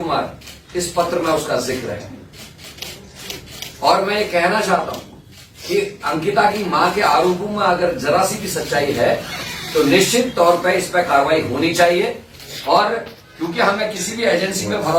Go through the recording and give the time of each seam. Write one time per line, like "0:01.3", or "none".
none

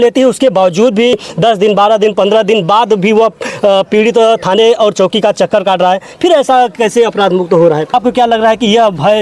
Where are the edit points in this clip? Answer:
0:01.1
0:07.9

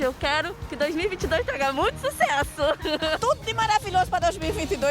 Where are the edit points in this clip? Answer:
0:03.2

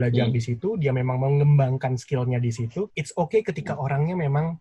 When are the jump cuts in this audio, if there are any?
0:03.0

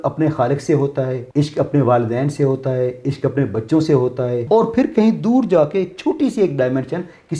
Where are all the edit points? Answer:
0:01.2
0:04.4

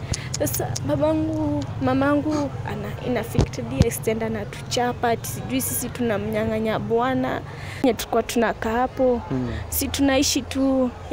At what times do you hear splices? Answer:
0:07.8

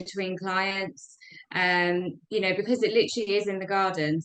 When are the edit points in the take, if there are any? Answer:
none

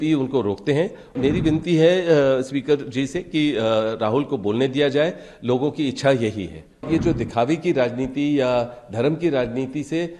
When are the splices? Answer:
0:01.2
0:06.9

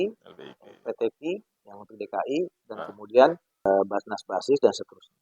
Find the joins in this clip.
0:03.7

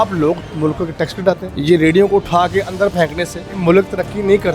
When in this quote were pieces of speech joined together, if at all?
0:01.5
0:03.4

